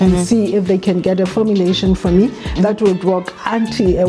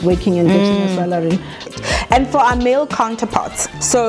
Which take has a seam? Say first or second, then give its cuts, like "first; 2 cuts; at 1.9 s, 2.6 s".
second; 1 cut; at 1.6 s